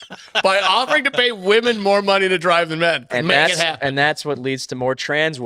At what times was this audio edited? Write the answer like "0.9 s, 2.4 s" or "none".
3.1 s

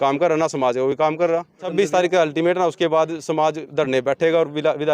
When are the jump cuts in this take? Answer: 1.6 s

